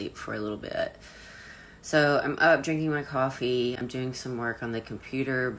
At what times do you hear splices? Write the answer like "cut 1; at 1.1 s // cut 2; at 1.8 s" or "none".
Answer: cut 1; at 3.8 s